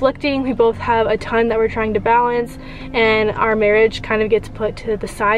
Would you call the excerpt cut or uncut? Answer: uncut